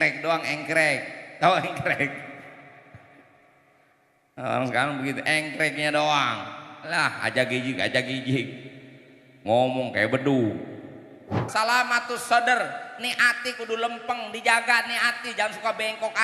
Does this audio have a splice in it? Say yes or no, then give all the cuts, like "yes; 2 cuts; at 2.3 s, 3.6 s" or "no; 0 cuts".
yes; 1 cut; at 11.4 s